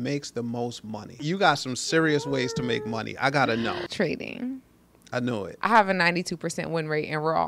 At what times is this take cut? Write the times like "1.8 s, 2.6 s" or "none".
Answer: 1.1 s, 3.8 s, 5.5 s